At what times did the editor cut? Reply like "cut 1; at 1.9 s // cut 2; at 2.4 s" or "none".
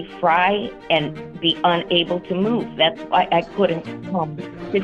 cut 1; at 3.9 s